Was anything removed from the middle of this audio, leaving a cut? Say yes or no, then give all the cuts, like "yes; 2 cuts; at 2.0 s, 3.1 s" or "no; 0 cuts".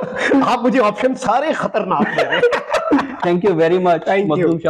no; 0 cuts